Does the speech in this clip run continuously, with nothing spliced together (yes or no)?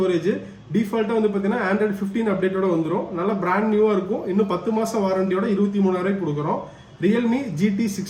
yes